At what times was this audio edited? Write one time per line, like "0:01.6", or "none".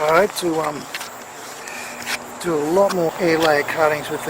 0:03.1